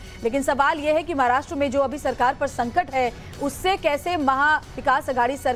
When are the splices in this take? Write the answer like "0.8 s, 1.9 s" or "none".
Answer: none